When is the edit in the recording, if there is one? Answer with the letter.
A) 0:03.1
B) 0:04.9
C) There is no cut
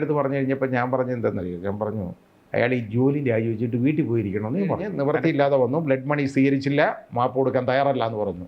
B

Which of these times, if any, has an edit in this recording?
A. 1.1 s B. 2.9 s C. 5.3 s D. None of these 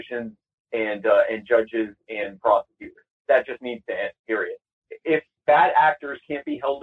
C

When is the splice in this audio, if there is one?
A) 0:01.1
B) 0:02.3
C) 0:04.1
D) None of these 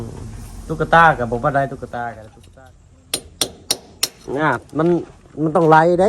B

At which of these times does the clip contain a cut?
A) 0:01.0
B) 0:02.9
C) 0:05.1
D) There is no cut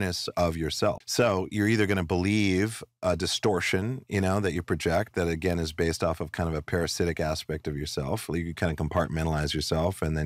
A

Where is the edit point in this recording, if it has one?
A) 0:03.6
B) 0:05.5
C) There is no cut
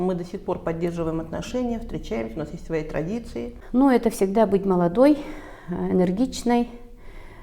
A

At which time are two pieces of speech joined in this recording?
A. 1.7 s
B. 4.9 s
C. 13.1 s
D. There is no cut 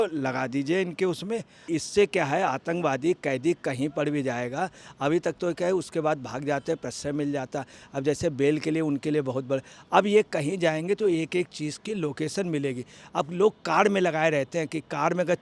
A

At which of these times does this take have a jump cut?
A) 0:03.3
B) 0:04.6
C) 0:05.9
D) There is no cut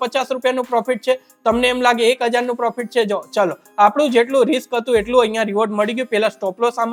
D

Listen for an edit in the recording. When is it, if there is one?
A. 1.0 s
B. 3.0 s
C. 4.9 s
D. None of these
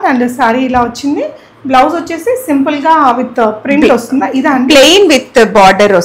D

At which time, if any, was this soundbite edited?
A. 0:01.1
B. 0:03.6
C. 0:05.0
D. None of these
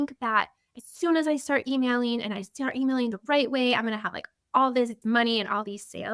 C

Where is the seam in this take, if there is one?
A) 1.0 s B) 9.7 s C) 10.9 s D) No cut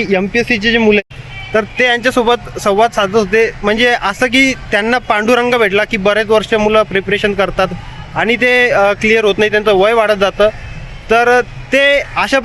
A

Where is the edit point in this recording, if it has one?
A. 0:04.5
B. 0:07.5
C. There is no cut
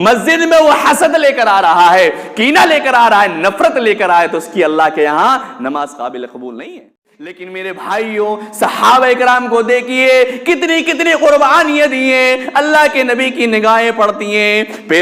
B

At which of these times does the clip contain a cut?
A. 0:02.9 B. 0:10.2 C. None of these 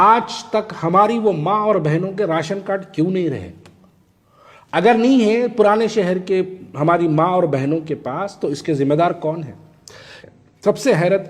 B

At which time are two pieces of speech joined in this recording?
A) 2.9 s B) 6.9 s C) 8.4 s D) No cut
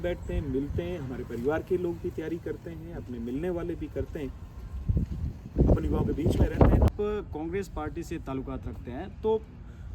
B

